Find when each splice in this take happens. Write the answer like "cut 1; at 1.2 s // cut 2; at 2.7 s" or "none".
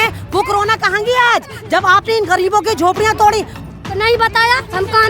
cut 1; at 3.6 s